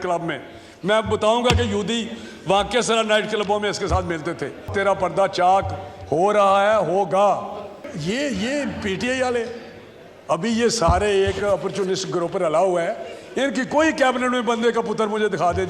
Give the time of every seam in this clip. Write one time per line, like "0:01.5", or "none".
0:04.7
0:07.9